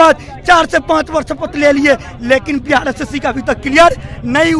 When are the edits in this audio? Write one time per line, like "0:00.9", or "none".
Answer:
none